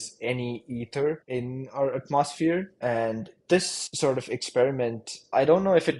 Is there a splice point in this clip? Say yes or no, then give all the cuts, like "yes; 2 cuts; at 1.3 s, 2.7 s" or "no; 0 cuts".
no; 0 cuts